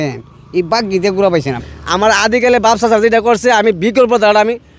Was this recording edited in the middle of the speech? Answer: yes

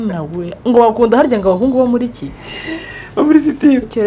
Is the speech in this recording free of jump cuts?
yes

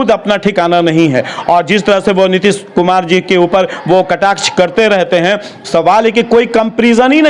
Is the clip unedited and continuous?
yes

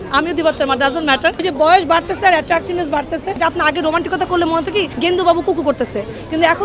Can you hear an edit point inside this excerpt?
yes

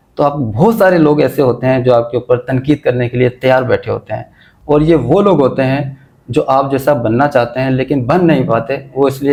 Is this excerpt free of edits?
yes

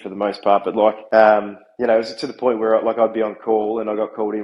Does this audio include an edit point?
yes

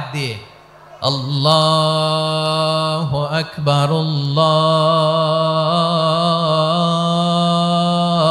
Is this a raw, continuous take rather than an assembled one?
yes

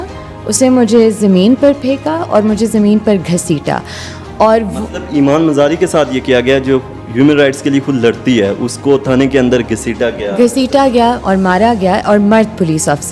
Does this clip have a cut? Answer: no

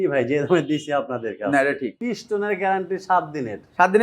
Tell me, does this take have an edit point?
yes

